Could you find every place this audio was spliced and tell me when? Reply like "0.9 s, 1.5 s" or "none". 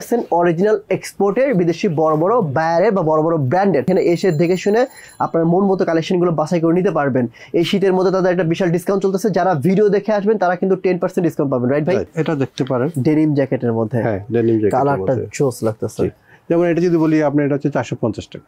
3.9 s, 12.1 s, 16.3 s